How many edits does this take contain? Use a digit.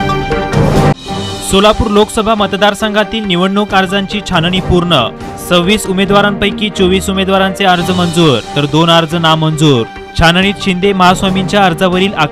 1